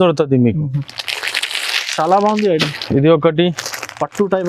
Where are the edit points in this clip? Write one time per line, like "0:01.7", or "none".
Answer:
none